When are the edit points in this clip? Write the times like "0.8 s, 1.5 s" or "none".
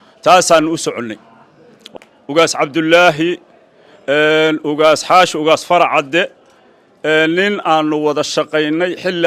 1.9 s